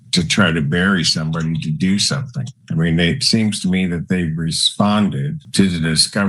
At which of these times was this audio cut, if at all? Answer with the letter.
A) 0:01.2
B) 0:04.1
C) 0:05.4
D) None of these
C